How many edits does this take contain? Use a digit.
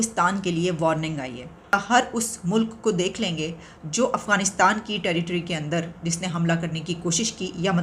1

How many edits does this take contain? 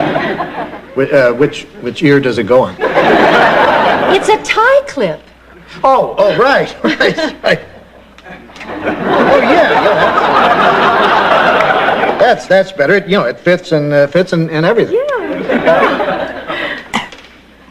1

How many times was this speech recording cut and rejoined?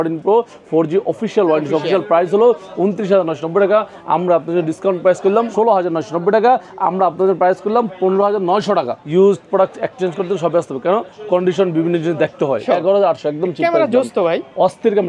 3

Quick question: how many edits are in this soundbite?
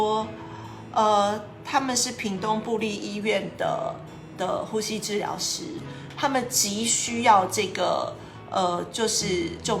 1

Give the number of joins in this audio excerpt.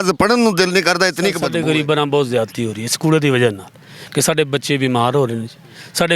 1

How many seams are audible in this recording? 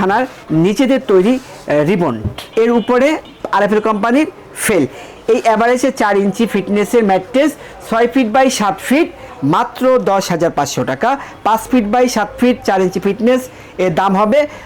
3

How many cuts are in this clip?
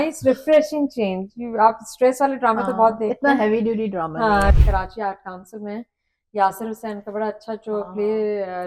1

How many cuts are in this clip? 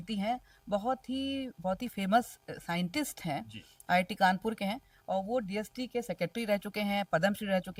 0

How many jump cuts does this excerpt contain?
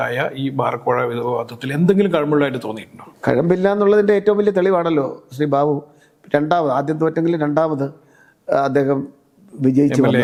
0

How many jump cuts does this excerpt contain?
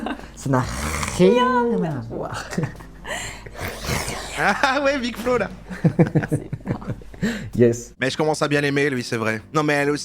2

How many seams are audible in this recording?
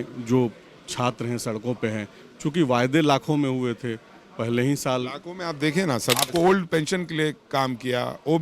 1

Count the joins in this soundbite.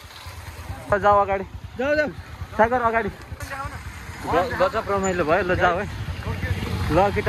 2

